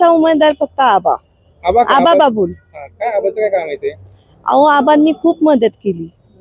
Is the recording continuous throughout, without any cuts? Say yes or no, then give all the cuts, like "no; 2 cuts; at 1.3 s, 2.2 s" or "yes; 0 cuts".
yes; 0 cuts